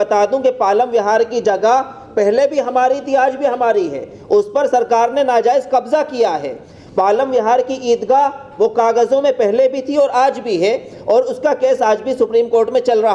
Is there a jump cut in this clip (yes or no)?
no